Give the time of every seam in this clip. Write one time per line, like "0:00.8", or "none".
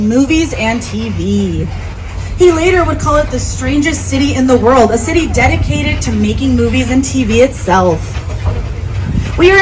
none